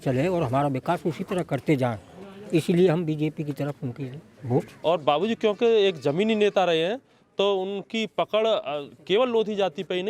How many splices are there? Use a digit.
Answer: 1